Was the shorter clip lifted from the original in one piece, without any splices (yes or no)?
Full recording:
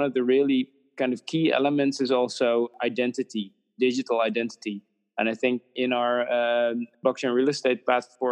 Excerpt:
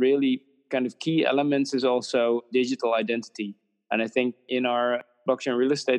no